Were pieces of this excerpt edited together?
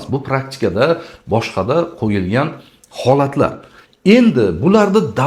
no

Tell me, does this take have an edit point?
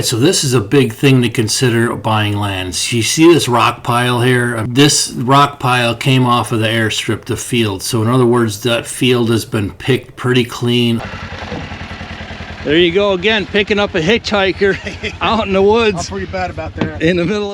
yes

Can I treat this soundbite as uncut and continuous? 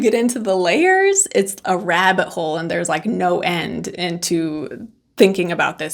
yes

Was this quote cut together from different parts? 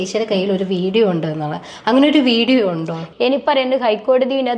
yes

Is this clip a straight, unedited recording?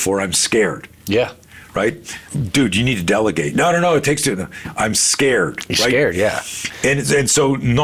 yes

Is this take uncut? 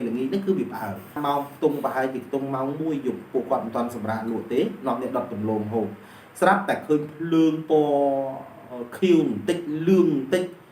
no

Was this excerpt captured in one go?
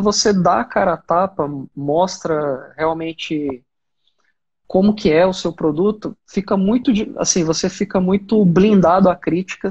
yes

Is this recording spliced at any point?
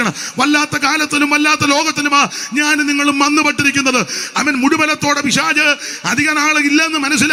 no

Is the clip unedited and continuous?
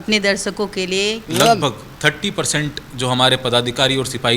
no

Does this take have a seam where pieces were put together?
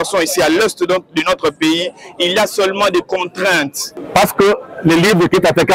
yes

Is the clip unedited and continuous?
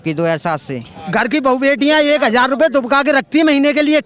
no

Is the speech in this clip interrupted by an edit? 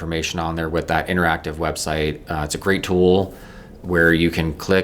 no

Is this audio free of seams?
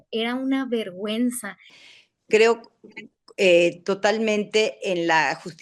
no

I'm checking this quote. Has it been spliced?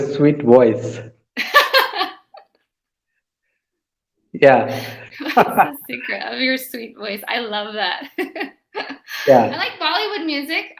yes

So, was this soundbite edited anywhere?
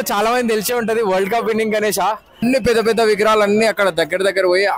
yes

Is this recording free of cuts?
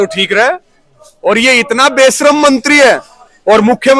yes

